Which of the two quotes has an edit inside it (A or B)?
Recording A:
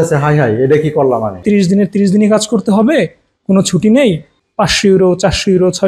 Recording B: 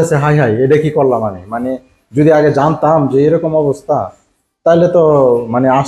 A